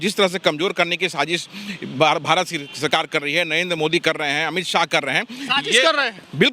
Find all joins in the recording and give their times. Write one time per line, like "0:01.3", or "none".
none